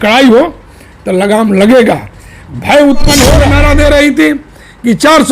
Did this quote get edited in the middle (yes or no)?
yes